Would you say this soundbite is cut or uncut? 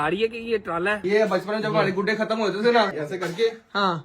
cut